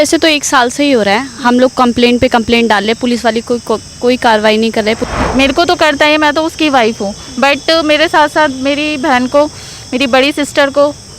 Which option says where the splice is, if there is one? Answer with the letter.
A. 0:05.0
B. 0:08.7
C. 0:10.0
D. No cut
A